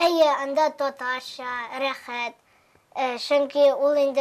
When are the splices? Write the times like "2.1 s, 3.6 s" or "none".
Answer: none